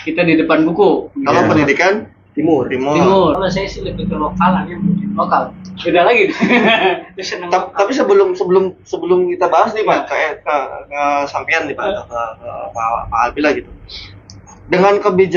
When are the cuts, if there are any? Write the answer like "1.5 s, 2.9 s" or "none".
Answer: 3.4 s

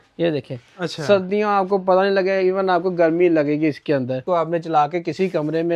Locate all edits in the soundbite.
4.2 s

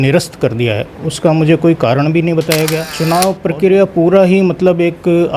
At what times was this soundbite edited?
2.9 s

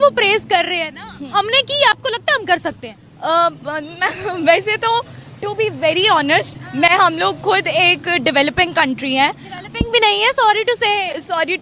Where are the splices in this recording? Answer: none

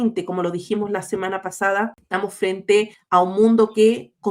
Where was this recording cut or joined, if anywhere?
2.0 s, 3.0 s

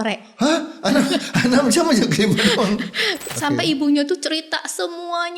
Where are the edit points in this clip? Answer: 3.2 s

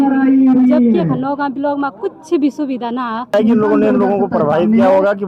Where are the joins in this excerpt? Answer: 3.3 s

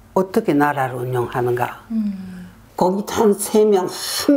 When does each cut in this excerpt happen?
2.6 s

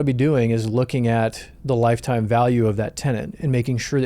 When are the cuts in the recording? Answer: none

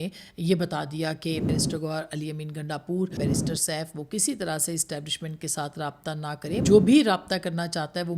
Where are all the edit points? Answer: 1.5 s, 3.2 s, 6.6 s

